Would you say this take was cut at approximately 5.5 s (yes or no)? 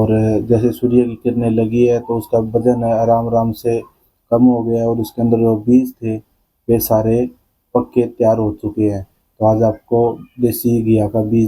no